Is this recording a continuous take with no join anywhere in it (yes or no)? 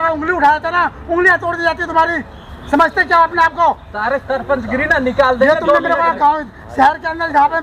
yes